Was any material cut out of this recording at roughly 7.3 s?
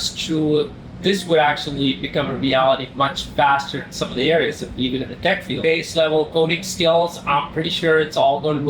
no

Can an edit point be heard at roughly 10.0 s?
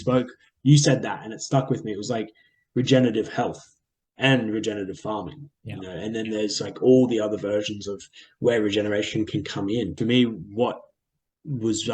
yes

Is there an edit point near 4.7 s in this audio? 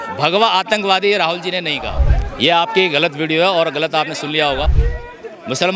yes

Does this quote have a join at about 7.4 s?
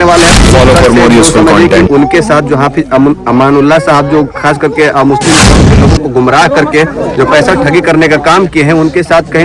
no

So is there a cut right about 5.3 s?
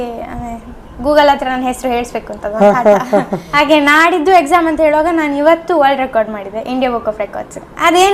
no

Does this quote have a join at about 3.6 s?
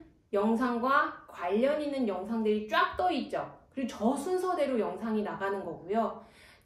no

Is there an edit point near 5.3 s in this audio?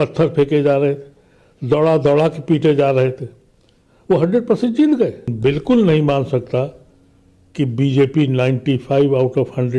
yes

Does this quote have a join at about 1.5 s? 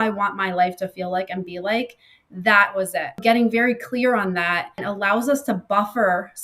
no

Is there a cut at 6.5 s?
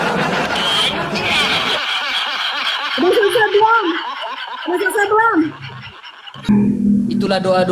yes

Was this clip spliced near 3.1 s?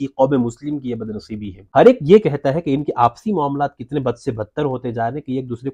no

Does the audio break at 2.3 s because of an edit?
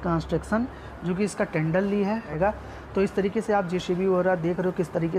yes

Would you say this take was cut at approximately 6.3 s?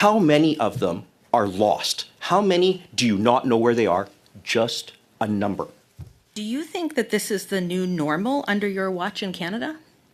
yes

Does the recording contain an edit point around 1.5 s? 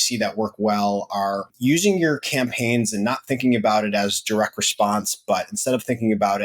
yes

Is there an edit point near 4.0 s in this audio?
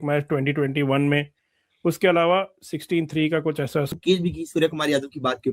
yes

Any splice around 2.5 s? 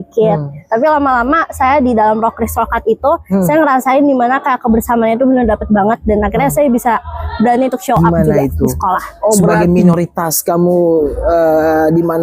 no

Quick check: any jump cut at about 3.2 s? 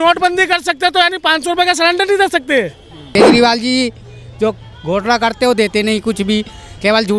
yes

